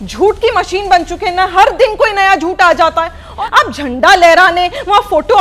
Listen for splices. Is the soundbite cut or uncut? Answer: cut